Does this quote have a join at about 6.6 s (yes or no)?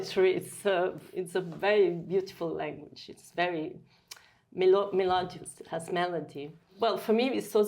yes